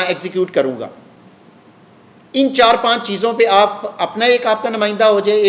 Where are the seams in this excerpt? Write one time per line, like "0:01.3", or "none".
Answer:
none